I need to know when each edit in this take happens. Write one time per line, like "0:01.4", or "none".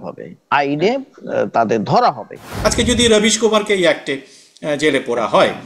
0:02.4